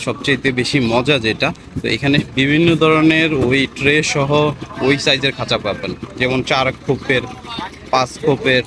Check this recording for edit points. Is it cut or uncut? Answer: uncut